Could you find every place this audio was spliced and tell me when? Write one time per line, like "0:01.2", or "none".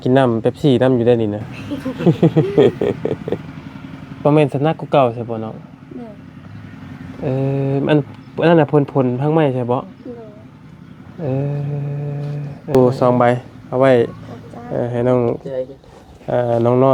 0:03.5
0:12.8